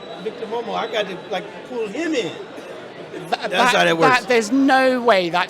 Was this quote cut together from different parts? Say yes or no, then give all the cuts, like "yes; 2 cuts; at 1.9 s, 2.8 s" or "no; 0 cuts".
no; 0 cuts